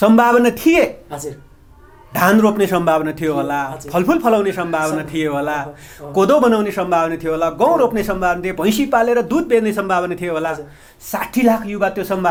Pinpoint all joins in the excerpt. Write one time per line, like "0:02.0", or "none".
none